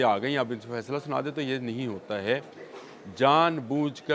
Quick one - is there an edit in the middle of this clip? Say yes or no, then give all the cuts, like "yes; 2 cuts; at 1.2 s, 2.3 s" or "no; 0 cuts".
no; 0 cuts